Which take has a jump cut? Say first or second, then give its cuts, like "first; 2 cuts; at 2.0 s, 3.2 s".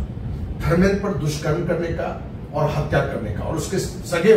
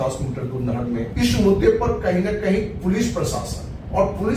second; 1 cut; at 1.1 s